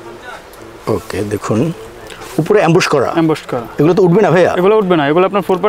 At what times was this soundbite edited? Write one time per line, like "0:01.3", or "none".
none